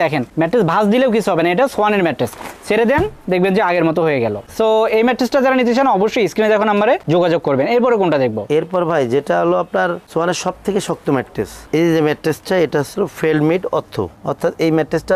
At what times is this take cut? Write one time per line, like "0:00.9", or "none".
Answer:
none